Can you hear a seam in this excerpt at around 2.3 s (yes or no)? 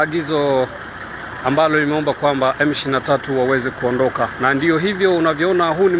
no